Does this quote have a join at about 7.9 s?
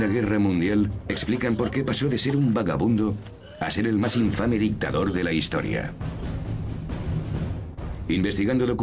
no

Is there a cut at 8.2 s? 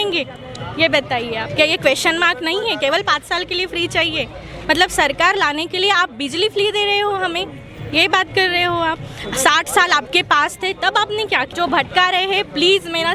no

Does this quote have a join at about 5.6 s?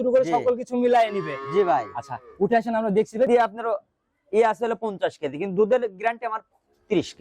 no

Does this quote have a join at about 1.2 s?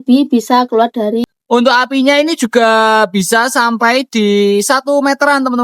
yes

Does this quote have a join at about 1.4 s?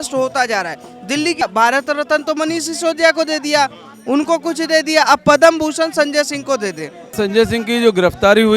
yes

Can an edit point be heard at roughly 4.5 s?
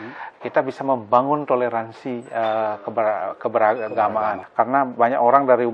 yes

